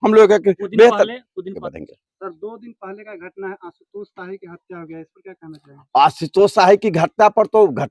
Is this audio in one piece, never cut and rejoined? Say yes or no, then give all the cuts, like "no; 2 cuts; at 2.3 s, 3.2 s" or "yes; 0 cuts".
no; 1 cut; at 1.6 s